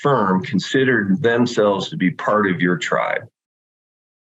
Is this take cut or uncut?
uncut